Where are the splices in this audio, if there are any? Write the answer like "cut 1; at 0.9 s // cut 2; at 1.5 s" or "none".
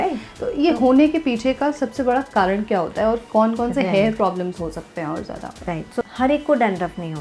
cut 1; at 6.0 s